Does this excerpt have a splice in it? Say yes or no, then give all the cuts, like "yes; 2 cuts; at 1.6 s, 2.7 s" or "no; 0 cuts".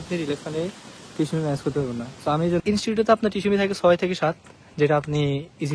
yes; 1 cut; at 2.6 s